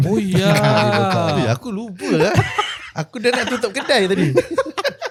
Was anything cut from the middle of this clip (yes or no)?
no